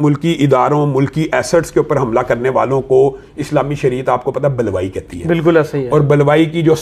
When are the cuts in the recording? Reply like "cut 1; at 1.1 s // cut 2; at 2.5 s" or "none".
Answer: none